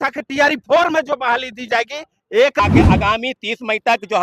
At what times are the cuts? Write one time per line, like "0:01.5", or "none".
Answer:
0:02.6